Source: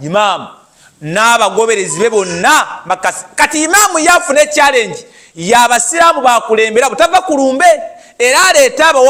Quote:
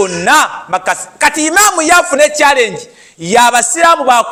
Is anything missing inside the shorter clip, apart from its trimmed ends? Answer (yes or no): no